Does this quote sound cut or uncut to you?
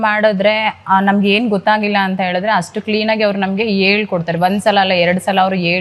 uncut